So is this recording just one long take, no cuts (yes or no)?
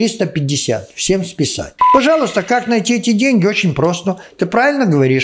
no